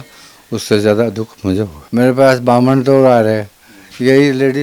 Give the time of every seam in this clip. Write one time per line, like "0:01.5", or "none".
0:01.8